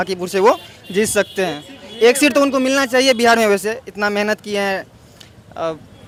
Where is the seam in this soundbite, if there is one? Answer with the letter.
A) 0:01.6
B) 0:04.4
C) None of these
C